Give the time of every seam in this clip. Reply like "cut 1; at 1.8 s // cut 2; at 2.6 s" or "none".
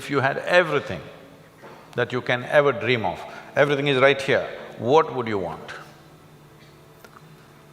none